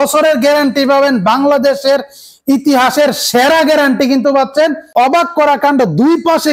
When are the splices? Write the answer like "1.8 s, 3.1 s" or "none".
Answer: 4.8 s